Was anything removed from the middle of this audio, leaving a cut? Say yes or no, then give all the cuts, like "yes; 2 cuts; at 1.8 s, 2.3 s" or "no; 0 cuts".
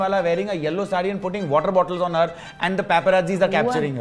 no; 0 cuts